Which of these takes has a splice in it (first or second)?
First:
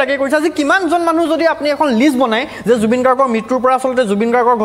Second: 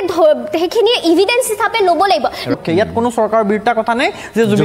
second